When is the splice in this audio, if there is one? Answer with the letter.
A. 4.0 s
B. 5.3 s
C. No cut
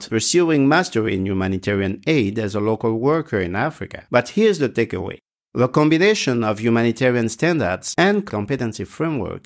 C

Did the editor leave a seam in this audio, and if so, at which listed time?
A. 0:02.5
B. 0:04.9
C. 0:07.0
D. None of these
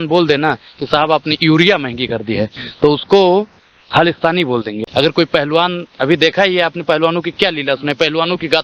D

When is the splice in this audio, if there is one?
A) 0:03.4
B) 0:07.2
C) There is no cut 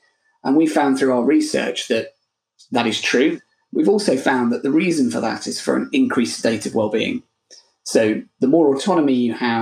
A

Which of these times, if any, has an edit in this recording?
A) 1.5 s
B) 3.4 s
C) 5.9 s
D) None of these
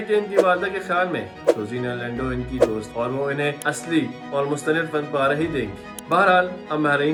D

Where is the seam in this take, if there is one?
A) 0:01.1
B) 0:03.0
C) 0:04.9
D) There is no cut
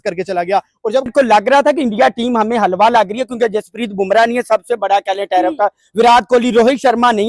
A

